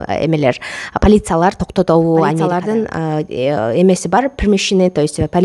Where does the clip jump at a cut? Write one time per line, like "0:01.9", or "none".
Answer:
0:03.0